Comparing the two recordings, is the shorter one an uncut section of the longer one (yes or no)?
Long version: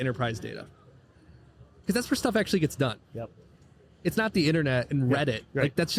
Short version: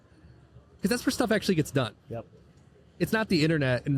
yes